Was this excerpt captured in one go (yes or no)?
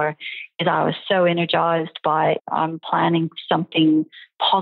no